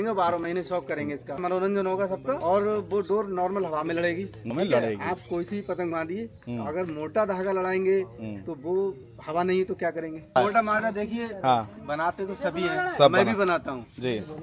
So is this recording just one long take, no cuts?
no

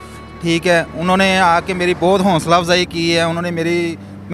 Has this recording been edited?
no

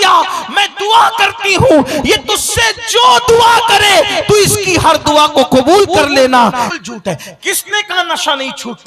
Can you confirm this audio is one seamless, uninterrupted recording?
no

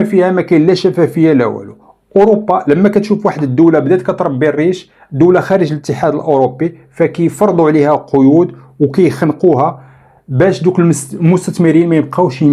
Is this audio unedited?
yes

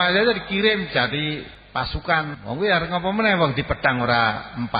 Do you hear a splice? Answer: yes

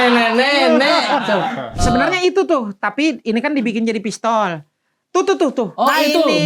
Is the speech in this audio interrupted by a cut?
yes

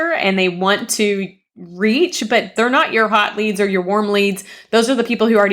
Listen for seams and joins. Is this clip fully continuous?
no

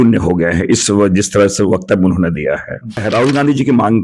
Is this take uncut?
no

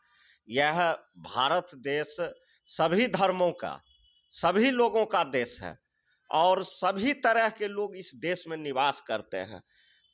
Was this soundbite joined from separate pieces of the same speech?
no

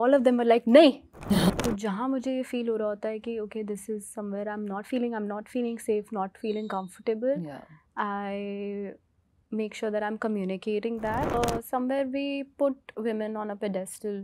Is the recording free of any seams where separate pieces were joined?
no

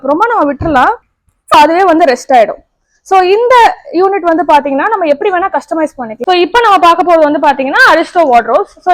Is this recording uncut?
no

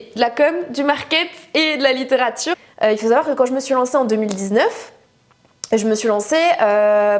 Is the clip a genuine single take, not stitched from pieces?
no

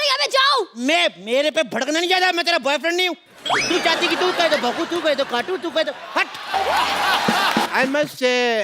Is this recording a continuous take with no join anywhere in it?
no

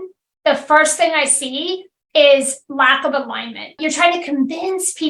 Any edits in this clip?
yes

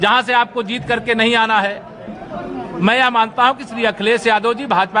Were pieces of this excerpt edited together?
no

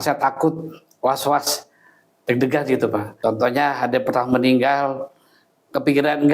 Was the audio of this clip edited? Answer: yes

